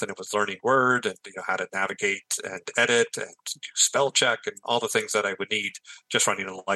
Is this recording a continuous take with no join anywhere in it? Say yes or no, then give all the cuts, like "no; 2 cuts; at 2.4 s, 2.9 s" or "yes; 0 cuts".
yes; 0 cuts